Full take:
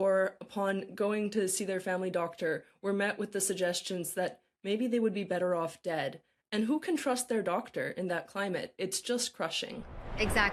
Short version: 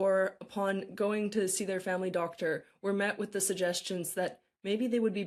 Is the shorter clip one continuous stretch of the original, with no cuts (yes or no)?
yes